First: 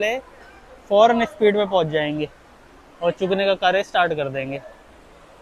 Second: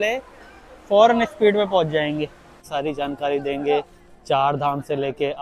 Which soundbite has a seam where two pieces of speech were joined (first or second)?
second